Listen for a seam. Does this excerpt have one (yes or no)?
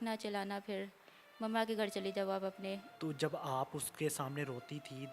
yes